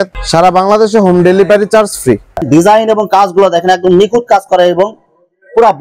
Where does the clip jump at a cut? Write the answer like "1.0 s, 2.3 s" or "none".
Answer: 2.3 s